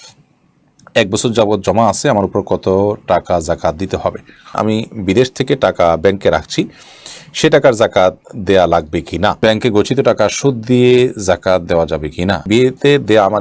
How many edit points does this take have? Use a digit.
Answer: 3